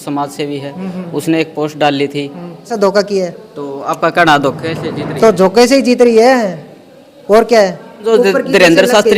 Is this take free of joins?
no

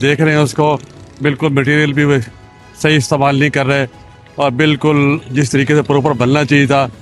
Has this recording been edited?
no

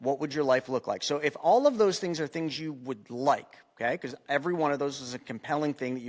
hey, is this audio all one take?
yes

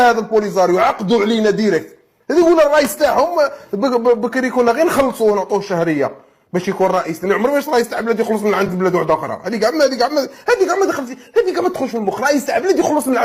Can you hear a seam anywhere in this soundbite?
no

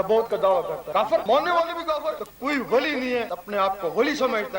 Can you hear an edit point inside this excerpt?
yes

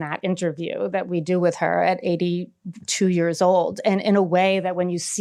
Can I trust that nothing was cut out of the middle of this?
yes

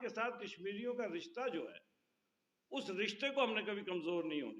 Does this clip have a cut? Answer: no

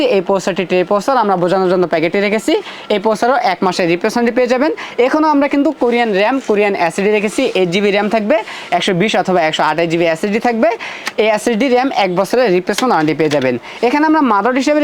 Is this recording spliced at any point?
no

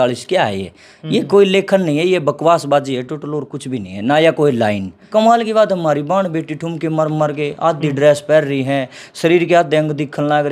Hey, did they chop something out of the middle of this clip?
yes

